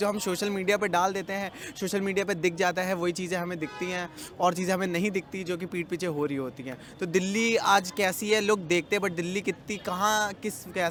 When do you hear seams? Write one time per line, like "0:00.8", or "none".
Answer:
none

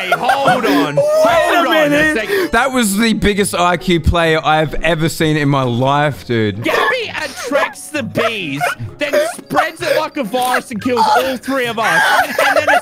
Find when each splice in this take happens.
none

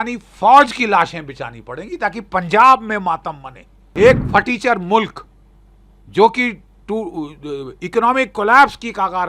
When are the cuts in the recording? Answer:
0:03.8

